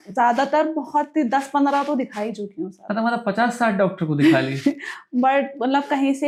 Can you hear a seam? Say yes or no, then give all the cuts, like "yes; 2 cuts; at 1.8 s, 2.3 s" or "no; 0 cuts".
no; 0 cuts